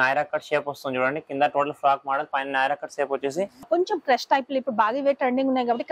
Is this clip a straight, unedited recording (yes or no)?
no